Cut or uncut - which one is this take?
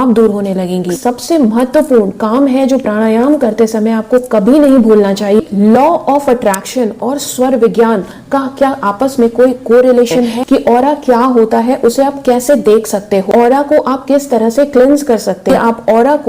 cut